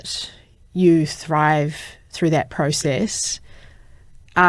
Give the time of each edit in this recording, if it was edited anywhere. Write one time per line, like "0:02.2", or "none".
none